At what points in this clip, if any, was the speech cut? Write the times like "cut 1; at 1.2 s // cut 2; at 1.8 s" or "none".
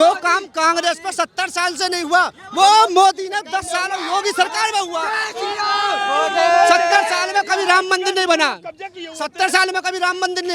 none